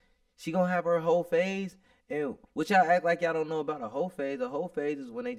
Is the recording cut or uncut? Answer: uncut